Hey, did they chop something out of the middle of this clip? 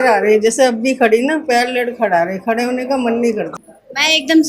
yes; 1 cut; at 3.5 s

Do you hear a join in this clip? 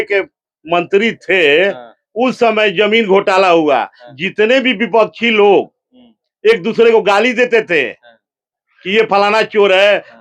yes; 1 cut; at 4.0 s

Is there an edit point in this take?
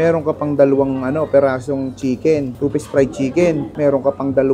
no; 0 cuts

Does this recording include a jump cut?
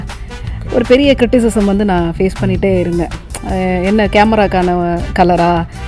no; 0 cuts

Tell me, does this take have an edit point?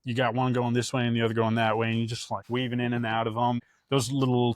yes; 2 cuts; at 2.3 s, 3.6 s

